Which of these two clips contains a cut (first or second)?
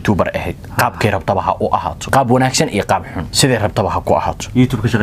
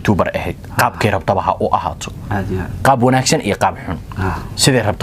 first